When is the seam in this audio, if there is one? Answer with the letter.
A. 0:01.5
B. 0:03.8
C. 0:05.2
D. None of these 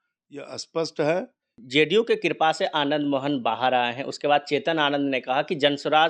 A